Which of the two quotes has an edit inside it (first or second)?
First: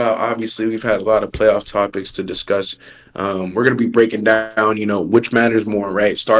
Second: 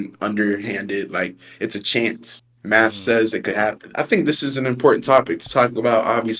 second